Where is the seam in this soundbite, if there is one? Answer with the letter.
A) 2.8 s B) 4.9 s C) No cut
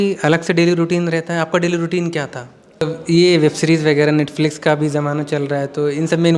A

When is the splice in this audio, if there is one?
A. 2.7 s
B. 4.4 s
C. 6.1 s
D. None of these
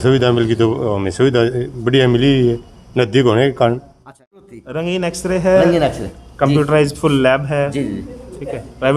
B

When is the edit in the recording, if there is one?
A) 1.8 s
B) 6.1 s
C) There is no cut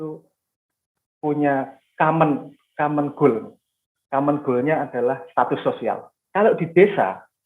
B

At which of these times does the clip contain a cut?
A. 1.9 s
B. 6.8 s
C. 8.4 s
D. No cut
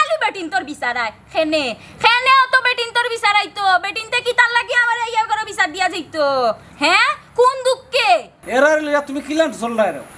C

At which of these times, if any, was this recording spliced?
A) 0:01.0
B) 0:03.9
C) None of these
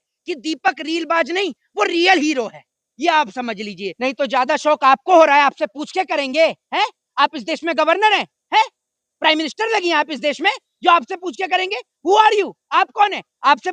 B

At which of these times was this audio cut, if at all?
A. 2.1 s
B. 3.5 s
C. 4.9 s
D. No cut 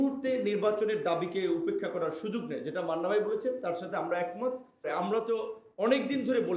C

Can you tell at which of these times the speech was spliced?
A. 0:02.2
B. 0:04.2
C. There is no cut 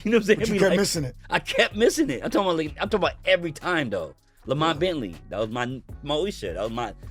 C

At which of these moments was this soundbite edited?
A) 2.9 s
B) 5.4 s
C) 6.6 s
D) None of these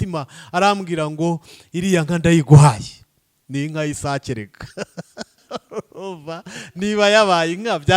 B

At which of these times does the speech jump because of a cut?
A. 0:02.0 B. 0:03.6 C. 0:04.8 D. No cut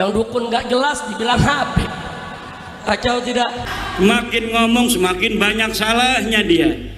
B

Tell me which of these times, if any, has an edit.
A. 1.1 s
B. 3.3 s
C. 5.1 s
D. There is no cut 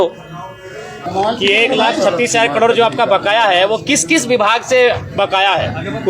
A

